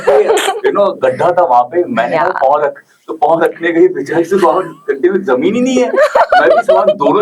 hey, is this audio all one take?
yes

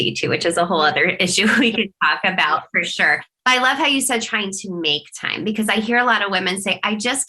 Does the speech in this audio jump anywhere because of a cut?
no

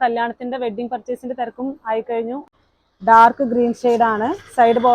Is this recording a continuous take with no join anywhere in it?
no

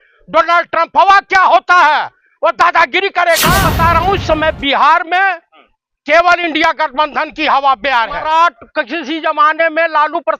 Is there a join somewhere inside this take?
yes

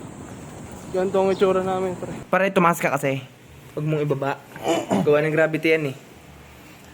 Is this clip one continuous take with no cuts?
no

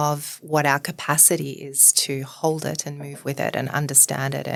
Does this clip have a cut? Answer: no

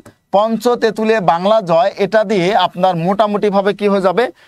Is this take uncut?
yes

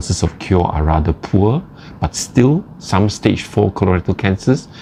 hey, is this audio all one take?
yes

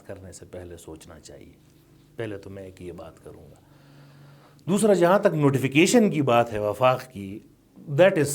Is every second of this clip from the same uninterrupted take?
yes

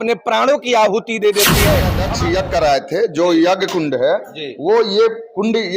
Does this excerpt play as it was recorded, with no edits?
no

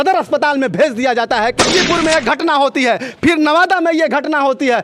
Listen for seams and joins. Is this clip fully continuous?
no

